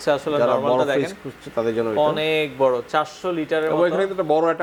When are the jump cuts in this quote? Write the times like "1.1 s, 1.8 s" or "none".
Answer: none